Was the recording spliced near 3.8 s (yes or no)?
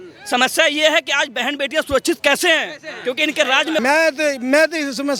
yes